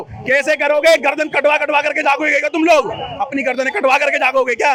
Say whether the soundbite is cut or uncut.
uncut